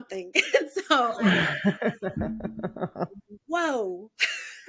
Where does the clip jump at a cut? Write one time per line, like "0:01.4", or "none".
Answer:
0:01.2